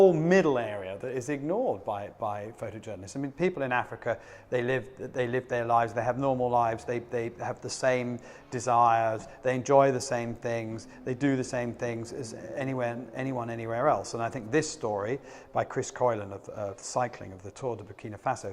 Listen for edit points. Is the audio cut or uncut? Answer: uncut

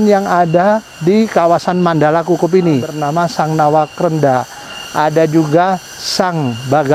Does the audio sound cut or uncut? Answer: cut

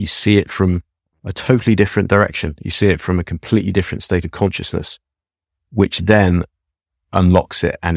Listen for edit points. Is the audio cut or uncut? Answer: uncut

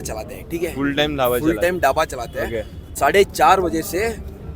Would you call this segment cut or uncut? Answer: cut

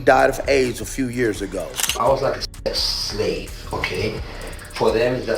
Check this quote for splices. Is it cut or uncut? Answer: cut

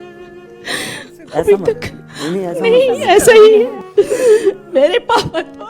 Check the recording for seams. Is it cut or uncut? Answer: cut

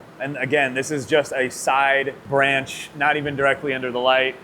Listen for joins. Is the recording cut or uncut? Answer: cut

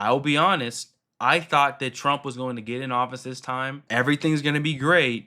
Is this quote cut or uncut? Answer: cut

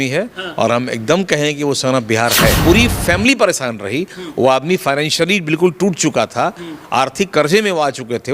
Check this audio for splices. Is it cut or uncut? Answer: cut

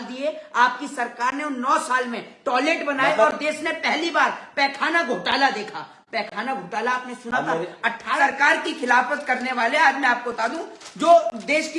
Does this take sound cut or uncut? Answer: cut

